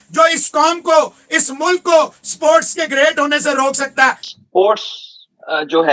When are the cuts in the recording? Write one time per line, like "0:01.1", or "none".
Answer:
0:04.4